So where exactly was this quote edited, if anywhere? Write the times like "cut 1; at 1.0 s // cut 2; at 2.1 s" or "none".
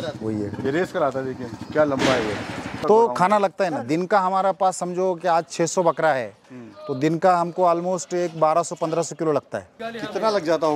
cut 1; at 2.8 s // cut 2; at 9.8 s